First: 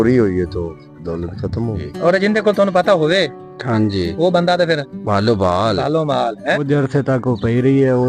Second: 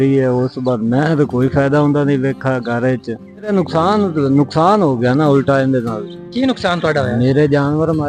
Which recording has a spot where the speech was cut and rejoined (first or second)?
first